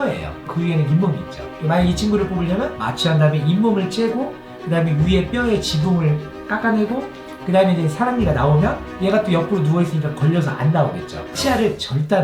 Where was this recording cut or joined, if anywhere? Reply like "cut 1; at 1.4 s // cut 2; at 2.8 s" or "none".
cut 1; at 11.2 s